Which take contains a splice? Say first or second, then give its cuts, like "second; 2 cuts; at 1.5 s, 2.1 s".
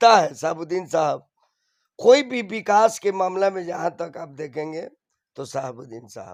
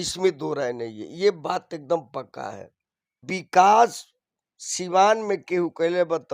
second; 1 cut; at 3.2 s